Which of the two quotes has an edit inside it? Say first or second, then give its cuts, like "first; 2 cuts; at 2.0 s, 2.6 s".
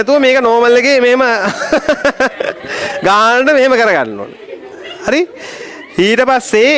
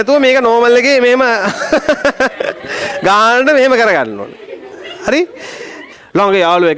second; 1 cut; at 5.9 s